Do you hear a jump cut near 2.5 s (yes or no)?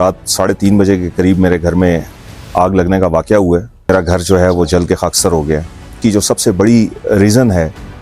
no